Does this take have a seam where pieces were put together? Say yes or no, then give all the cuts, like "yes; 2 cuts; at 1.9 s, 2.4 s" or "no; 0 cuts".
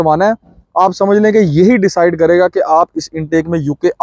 no; 0 cuts